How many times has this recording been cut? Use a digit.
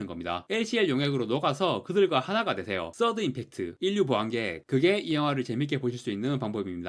0